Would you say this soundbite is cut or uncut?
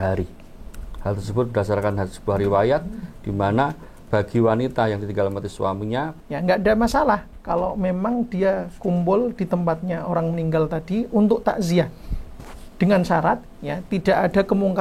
cut